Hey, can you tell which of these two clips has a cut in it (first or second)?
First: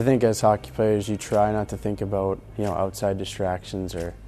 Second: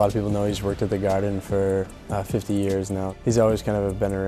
second